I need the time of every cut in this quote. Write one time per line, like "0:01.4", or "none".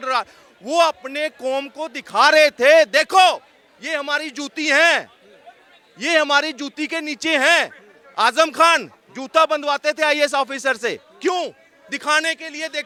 none